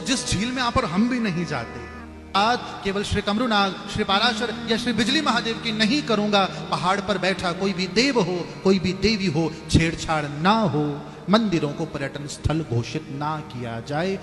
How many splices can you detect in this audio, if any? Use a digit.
1